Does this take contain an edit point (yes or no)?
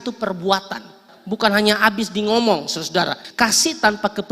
yes